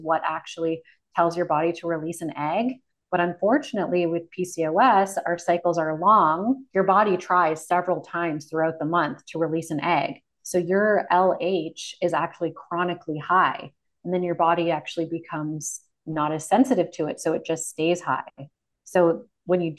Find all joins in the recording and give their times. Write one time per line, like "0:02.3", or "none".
0:06.6